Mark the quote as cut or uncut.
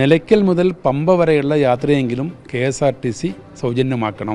uncut